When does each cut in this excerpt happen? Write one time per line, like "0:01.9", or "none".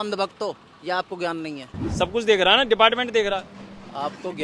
0:01.8